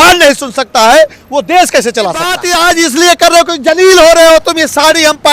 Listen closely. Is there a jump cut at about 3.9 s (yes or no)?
no